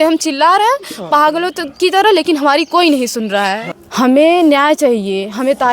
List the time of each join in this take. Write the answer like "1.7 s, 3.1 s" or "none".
3.7 s

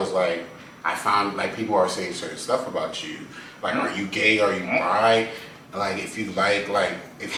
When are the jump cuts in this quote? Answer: none

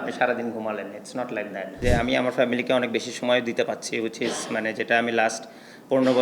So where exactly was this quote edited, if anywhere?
1.8 s

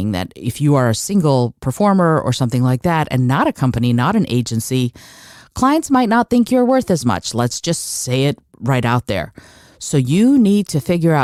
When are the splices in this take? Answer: none

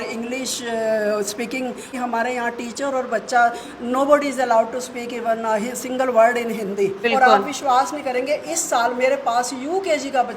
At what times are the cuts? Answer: 1.9 s, 7.0 s

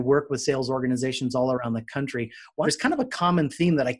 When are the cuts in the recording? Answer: 2.5 s

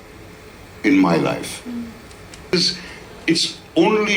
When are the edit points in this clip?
2.5 s

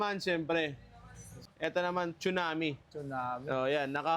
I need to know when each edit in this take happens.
1.4 s

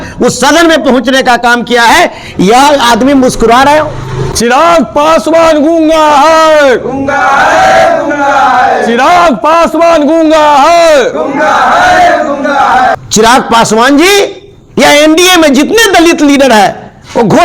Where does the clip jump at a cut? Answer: 4.2 s, 13.0 s

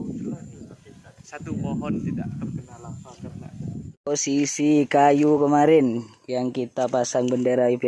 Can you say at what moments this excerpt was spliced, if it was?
none

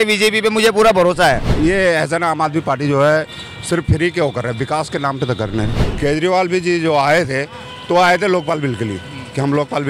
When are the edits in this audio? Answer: 1.5 s, 5.8 s

